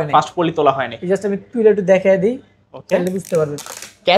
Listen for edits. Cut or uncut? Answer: uncut